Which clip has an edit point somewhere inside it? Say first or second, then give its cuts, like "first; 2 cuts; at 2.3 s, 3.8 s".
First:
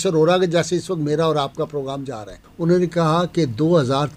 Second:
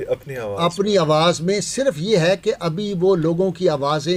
first; 1 cut; at 2.4 s